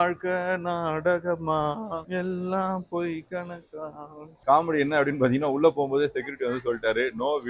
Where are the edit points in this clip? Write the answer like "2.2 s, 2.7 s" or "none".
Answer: 4.4 s

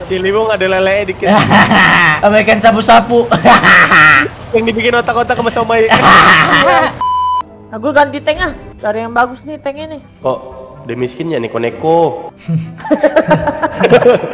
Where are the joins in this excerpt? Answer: 2.1 s, 7.0 s

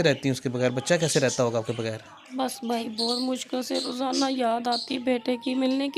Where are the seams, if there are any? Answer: none

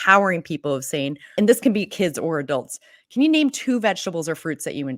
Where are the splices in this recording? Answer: 1.2 s

